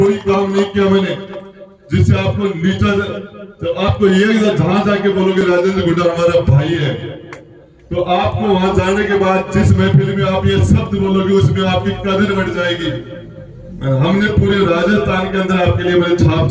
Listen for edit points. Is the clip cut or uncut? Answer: uncut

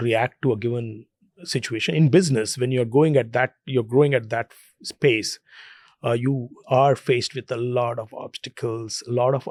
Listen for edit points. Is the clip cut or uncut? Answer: uncut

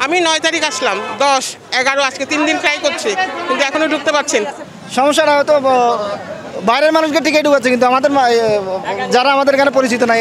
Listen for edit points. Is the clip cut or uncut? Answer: cut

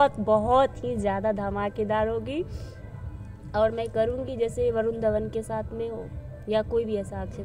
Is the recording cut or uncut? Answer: uncut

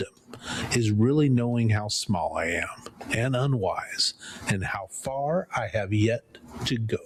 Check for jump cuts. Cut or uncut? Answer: uncut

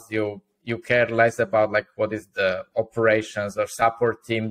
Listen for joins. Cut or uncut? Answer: uncut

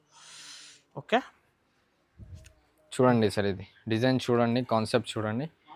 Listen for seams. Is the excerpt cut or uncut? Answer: uncut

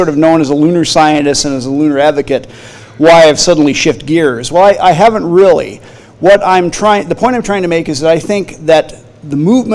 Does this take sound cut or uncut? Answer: uncut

